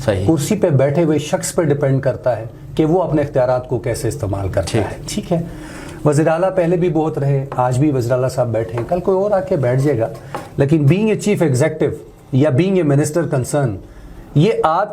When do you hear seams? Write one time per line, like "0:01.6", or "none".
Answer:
none